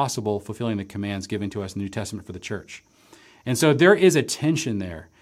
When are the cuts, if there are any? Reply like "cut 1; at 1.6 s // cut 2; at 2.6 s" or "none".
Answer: none

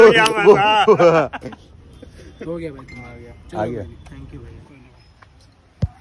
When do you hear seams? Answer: none

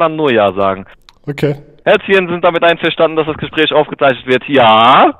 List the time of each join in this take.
cut 1; at 1.7 s

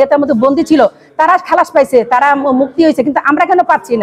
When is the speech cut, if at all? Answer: none

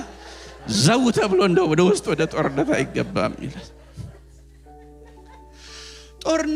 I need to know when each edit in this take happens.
none

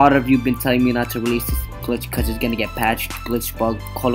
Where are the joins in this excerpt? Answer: cut 1; at 1.8 s

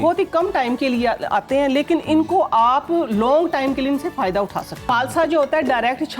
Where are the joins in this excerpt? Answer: cut 1; at 4.9 s

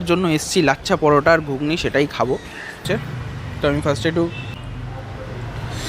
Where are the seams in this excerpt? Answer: cut 1; at 2.9 s

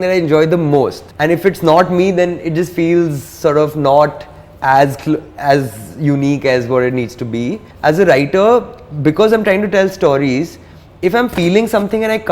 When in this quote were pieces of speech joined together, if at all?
cut 1; at 1.0 s // cut 2; at 7.7 s

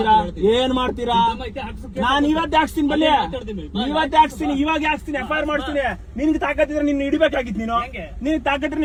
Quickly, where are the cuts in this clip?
none

